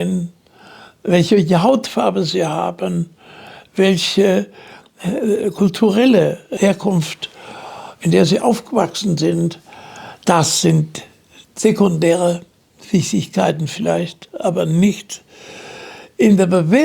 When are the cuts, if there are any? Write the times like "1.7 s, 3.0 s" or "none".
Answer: 6.5 s

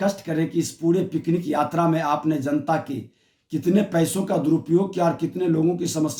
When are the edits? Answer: none

